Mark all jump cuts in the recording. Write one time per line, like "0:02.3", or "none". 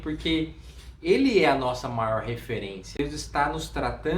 0:02.9